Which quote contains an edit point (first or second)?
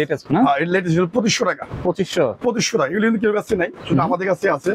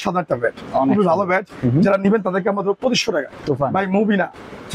second